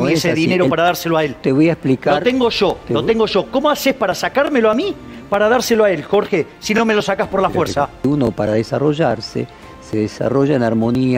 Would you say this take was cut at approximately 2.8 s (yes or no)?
no